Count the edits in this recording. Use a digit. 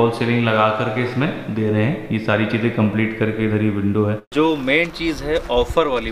1